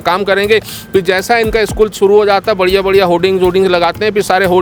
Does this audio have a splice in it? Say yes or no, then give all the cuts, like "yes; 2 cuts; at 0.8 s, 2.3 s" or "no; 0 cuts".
no; 0 cuts